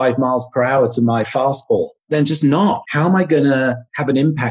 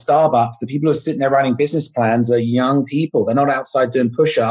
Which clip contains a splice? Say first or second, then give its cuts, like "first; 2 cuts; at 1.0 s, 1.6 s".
first; 2 cuts; at 2.0 s, 2.8 s